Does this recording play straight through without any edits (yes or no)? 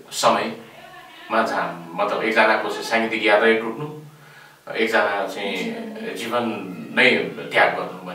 yes